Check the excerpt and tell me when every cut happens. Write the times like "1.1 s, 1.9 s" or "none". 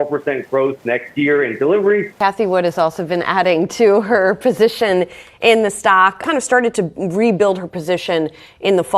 2.1 s, 6.2 s